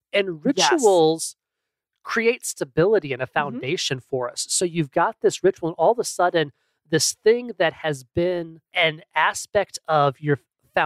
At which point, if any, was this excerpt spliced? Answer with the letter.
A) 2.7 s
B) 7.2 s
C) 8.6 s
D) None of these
C